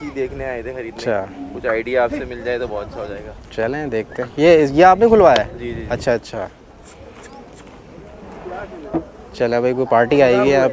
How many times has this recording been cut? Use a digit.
0